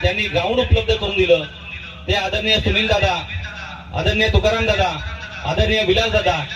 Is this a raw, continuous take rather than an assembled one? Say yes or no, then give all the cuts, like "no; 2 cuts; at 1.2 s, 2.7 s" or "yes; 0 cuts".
yes; 0 cuts